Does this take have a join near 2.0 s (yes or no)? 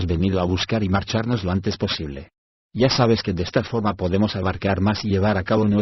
yes